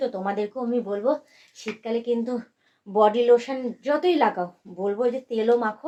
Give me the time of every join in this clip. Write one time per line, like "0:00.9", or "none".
none